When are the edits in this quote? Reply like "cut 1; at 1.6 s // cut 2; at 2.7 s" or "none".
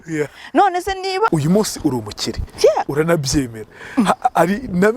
cut 1; at 1.3 s